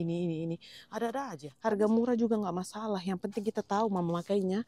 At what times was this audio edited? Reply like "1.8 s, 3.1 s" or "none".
1.4 s